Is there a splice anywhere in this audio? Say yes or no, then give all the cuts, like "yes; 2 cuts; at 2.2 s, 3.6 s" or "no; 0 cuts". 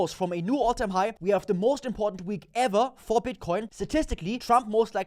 yes; 2 cuts; at 1.2 s, 4.0 s